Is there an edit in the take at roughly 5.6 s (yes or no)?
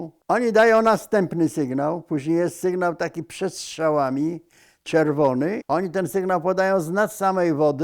yes